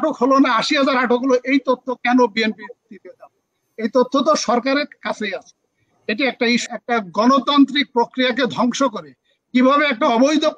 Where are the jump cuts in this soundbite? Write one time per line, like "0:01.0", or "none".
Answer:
0:06.6